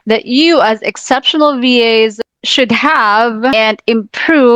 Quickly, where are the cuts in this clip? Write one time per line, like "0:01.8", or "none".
0:03.5